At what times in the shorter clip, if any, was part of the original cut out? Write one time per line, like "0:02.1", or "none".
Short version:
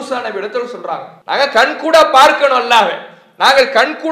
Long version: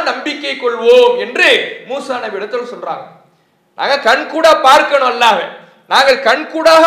0:01.1